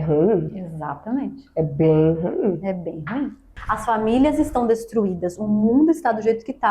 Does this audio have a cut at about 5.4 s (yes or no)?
no